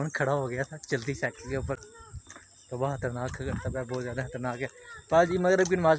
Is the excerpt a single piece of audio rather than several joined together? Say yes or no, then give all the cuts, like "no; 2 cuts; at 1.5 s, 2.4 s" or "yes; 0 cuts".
yes; 0 cuts